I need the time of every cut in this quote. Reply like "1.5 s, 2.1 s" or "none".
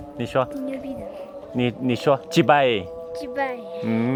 none